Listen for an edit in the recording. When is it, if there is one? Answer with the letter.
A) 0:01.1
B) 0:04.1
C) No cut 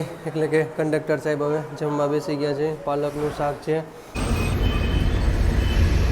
B